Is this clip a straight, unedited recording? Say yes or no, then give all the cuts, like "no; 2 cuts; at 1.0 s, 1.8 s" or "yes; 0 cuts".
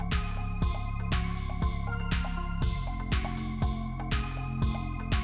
yes; 0 cuts